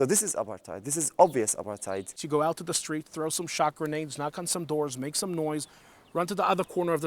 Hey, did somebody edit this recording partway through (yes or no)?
yes